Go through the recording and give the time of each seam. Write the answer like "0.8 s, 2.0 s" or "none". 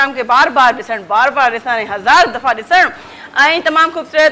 none